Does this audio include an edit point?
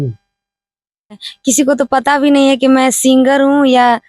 yes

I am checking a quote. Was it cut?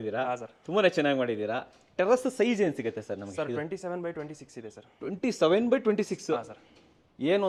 no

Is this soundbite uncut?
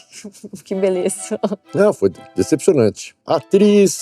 no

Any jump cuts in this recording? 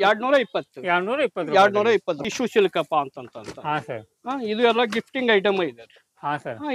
yes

